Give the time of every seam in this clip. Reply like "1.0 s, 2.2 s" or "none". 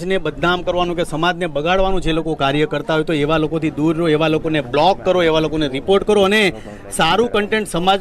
none

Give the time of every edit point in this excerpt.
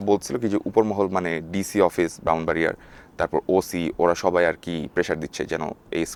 none

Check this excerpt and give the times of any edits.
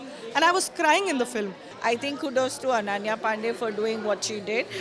1.6 s

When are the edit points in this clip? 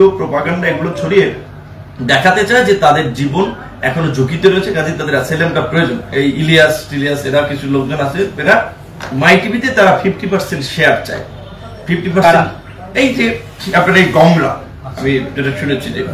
6.1 s

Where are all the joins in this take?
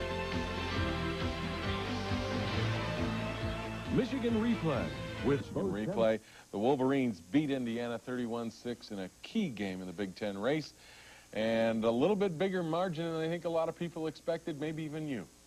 8.0 s

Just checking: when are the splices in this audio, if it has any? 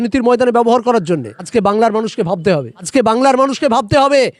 1.4 s, 2.9 s

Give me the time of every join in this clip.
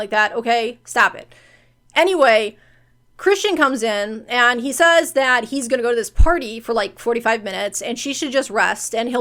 none

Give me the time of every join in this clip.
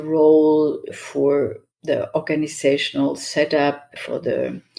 none

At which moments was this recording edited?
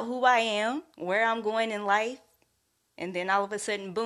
0.9 s

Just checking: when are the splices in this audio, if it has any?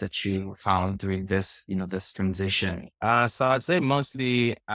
2.9 s

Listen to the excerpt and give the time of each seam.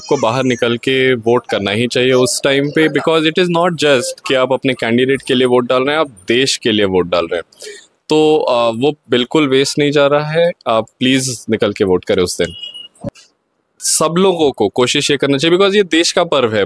none

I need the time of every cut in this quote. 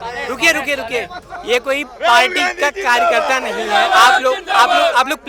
none

